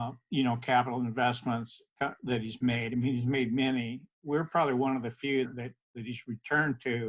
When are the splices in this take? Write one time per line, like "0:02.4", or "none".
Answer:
0:05.5